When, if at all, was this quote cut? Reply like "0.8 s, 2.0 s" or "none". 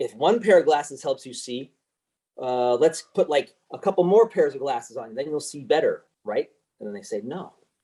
none